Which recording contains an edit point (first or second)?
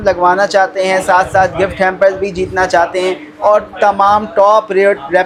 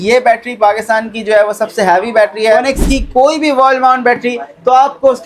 second